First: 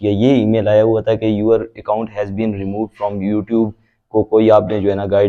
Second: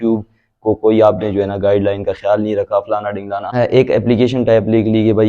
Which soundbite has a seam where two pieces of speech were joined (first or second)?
second